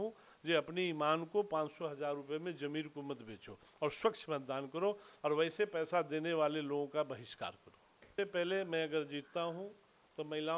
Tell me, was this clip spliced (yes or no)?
yes